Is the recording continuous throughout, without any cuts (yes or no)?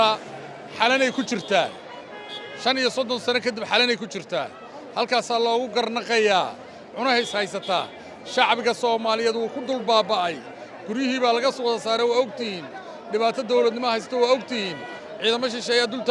yes